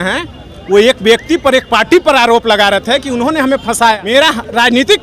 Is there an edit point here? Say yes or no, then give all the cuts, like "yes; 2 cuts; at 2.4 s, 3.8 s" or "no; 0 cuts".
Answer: yes; 1 cut; at 4.0 s